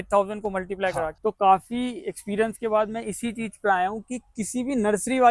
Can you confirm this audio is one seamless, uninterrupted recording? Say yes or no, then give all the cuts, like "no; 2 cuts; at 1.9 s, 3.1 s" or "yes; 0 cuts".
no; 1 cut; at 1.1 s